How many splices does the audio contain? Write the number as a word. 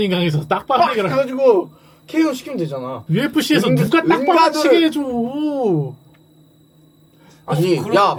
zero